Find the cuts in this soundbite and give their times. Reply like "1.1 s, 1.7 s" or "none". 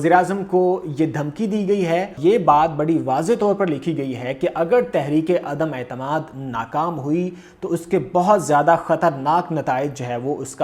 2.1 s